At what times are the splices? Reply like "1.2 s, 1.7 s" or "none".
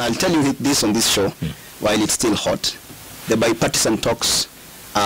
none